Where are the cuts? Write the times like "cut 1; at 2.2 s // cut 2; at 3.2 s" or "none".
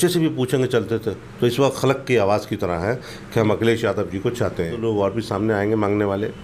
cut 1; at 4.8 s